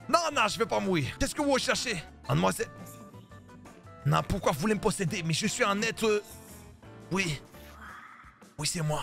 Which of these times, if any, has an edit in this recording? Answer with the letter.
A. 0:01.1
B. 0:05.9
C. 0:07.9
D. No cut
A